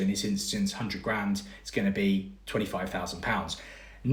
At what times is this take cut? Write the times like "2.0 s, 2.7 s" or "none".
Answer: none